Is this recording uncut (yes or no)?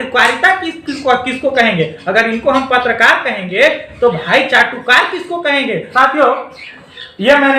no